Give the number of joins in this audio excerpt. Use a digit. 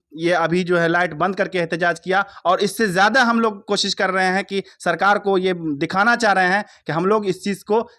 0